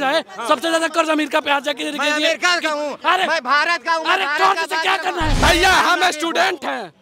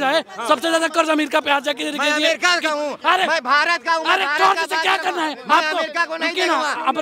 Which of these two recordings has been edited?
first; 1 cut; at 5.3 s

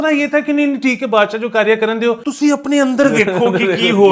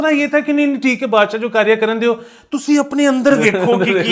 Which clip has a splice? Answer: first; 1 cut; at 2.3 s

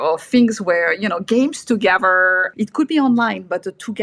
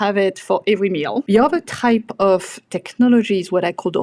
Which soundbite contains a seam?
second; 1 cut; at 1.2 s

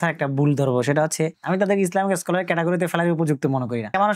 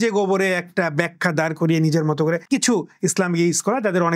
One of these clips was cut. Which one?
first; 1 cut; at 1.4 s

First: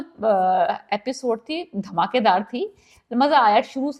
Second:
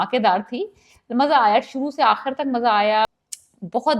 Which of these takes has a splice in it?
second; 1 cut; at 3.1 s

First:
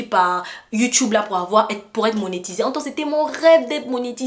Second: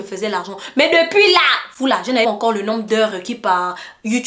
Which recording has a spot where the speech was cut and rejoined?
second; 1 cut; at 2.2 s

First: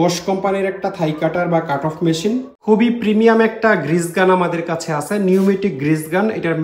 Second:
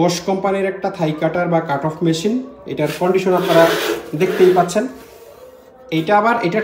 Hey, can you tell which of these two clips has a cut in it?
first; 1 cut; at 2.5 s

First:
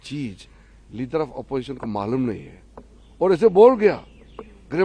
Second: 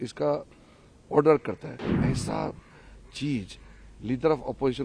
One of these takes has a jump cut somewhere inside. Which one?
second; 1 cut; at 1.9 s

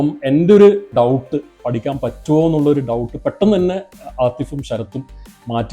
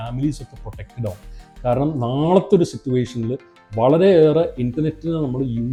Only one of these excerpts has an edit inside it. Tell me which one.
first; 1 cut; at 0.9 s

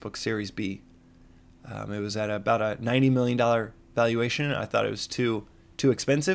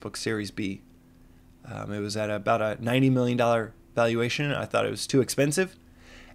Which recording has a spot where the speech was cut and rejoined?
second; 1 cut; at 5.0 s

